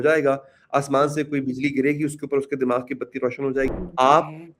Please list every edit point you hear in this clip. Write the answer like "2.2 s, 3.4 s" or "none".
3.7 s

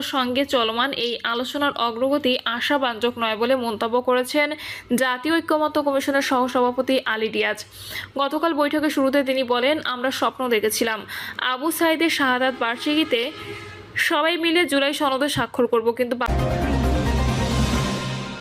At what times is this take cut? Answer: 16.3 s

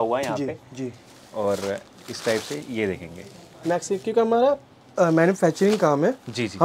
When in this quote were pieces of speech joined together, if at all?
none

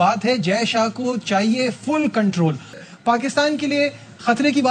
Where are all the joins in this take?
2.8 s

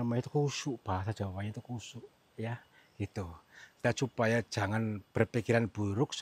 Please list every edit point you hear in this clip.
3.8 s

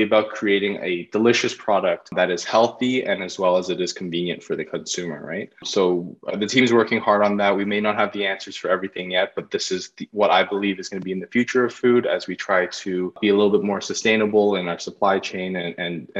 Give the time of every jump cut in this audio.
2.1 s, 5.6 s, 13.2 s

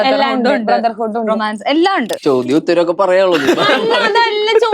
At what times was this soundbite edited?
2.1 s

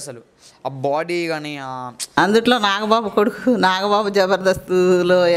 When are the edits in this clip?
2.0 s

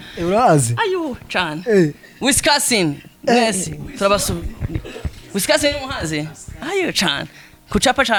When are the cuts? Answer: none

